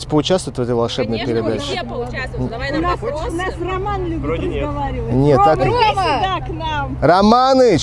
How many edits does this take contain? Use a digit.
0